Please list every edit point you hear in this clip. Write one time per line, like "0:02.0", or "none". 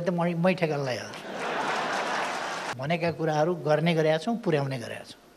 0:02.7